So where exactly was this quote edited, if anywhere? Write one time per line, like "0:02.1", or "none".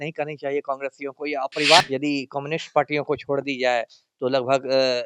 0:01.8